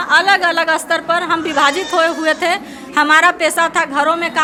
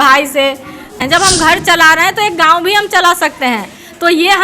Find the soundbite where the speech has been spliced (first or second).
second